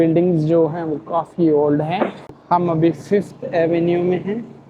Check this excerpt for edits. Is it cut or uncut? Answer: cut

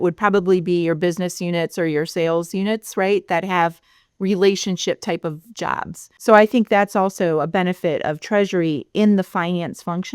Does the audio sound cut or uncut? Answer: uncut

